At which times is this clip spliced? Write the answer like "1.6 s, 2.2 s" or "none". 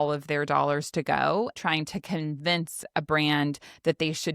1.6 s